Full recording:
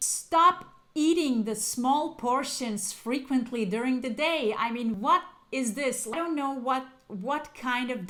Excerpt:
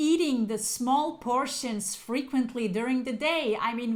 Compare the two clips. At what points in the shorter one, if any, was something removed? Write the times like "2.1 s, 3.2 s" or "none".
none